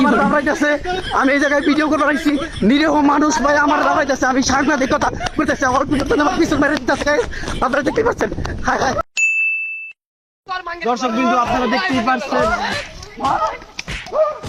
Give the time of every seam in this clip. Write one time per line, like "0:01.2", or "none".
none